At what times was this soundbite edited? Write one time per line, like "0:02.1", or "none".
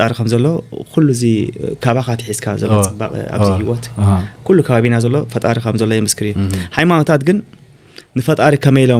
none